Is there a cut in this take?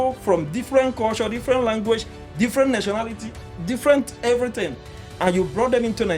no; 0 cuts

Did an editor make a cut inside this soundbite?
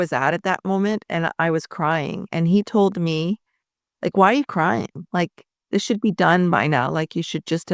no; 0 cuts

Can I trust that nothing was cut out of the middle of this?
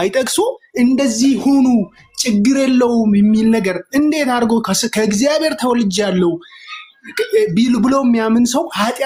yes; 0 cuts

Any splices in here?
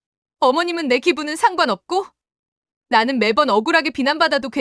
no; 0 cuts

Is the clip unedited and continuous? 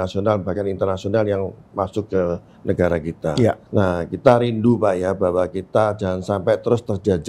no; 1 cut; at 3.6 s

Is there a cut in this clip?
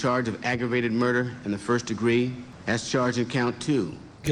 yes; 1 cut; at 2.5 s

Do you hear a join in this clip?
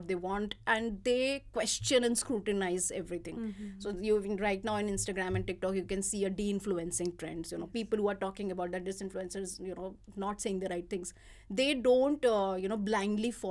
no; 0 cuts

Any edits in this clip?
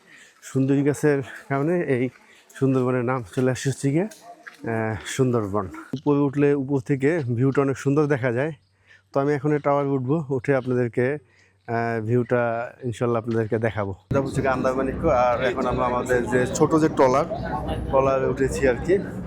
yes; 2 cuts; at 6.0 s, 14.1 s

